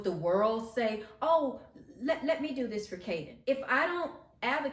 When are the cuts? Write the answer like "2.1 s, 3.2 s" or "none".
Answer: 3.3 s